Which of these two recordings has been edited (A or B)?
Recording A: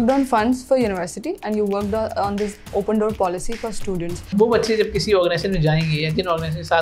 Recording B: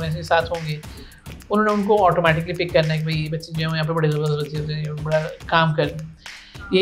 A